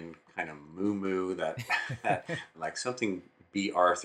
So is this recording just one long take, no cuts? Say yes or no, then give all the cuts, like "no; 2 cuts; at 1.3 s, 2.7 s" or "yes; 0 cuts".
no; 1 cut; at 2.5 s